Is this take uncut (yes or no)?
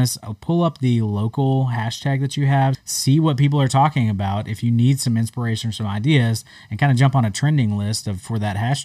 no